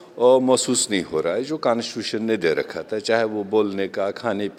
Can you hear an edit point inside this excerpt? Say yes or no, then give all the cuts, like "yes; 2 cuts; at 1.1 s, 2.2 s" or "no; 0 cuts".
no; 0 cuts